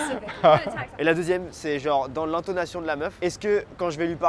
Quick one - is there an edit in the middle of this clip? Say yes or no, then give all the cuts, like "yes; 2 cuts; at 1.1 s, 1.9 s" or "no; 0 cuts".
yes; 2 cuts; at 0.9 s, 3.1 s